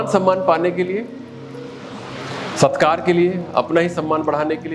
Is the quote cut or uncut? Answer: uncut